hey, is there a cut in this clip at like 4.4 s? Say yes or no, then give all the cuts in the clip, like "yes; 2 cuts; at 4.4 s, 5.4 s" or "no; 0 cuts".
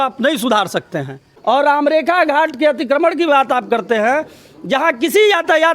no; 1 cut; at 1.3 s